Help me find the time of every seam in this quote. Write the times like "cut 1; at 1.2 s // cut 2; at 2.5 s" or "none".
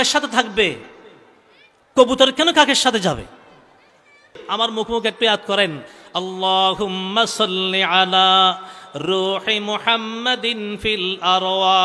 cut 1; at 4.4 s